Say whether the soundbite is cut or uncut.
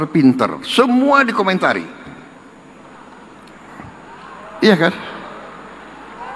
uncut